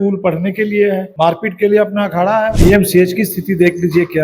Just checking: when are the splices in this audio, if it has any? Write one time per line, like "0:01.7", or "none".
0:01.1
0:02.6